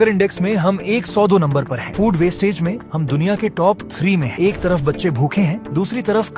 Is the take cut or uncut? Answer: uncut